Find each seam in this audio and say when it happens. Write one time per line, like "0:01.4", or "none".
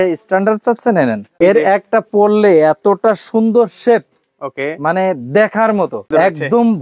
0:01.3
0:06.1